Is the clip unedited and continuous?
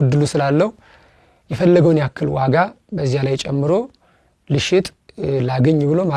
yes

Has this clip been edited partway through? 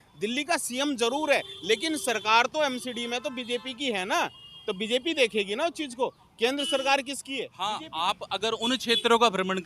yes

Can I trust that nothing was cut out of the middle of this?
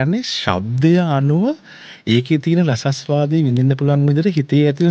yes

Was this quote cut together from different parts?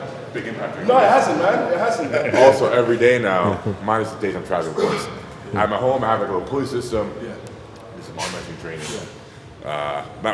yes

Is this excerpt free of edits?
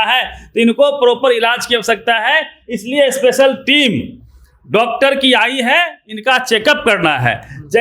yes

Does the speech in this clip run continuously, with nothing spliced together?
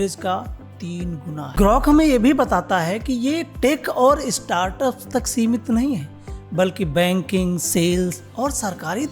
no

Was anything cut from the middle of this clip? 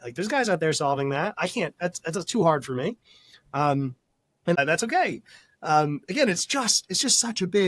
yes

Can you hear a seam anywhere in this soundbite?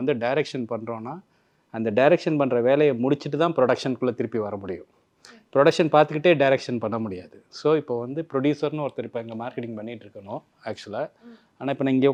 no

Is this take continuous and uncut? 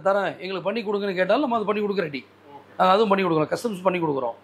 yes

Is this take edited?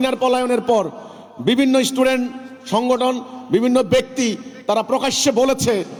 no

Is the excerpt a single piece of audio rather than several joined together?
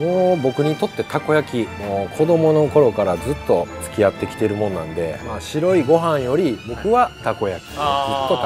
no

